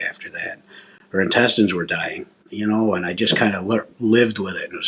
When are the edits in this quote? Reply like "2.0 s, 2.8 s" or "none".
2.4 s